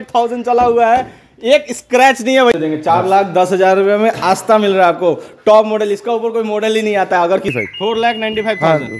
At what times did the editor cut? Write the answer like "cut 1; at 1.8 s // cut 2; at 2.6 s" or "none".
cut 1; at 2.5 s // cut 2; at 7.5 s